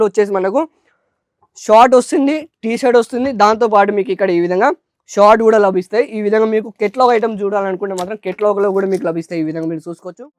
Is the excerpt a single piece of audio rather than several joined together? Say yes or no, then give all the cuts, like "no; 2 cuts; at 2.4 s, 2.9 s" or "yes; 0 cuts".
yes; 0 cuts